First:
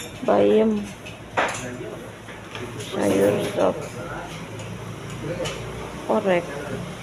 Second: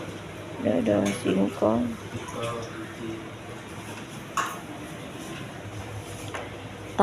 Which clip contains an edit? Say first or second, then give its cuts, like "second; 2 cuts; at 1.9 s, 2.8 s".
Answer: second; 1 cut; at 5.7 s